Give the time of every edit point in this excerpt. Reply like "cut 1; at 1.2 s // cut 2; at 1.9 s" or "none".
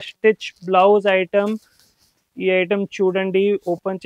none